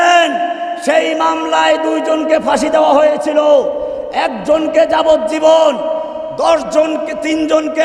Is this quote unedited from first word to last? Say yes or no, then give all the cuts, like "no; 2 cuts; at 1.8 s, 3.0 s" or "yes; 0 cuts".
yes; 0 cuts